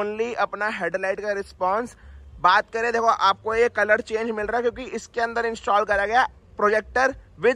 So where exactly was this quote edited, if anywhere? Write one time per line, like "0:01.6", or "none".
none